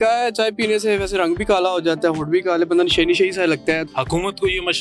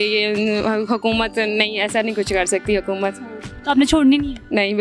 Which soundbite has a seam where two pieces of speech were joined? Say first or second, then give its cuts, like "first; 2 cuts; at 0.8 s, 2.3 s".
first; 1 cut; at 3.9 s